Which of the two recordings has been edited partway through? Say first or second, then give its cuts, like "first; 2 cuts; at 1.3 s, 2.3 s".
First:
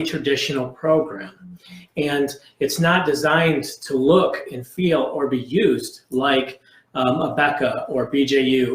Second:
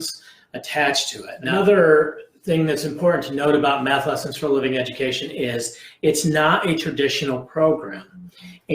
second; 1 cut; at 1.5 s